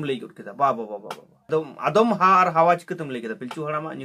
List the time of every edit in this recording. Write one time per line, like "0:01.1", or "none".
0:01.4